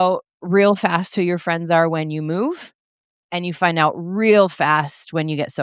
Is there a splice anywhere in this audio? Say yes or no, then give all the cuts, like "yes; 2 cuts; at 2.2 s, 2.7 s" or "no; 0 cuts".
no; 0 cuts